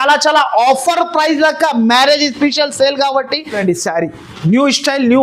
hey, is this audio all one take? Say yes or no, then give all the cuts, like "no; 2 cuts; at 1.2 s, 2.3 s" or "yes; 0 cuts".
no; 1 cut; at 3.6 s